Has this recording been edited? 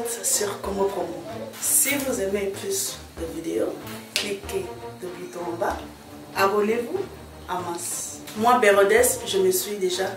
no; 0 cuts

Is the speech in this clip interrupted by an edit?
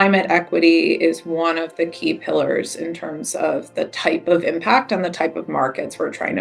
no; 0 cuts

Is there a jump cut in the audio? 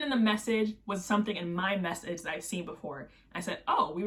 no; 0 cuts

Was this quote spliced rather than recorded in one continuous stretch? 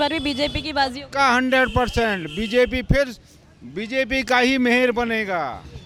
no; 0 cuts

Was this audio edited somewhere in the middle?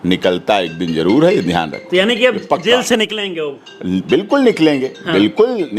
no; 0 cuts

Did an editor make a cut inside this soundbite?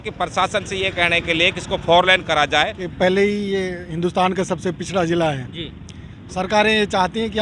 yes; 1 cut; at 2.8 s

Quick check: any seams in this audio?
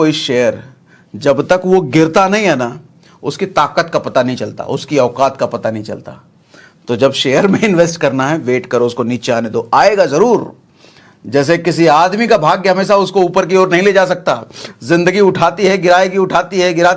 no; 0 cuts

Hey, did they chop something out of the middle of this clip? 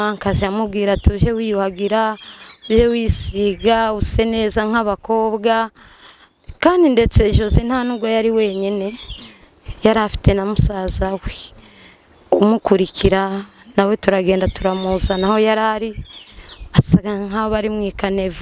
no; 0 cuts

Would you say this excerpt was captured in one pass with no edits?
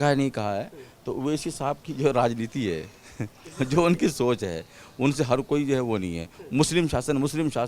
yes; 0 cuts

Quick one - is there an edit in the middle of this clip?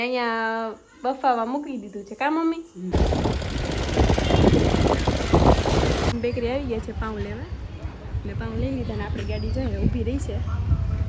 yes; 2 cuts; at 2.9 s, 6.1 s

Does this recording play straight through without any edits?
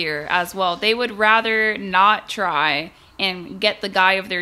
yes; 0 cuts

